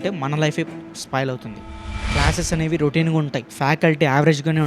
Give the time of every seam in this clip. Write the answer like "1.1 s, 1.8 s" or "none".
1.8 s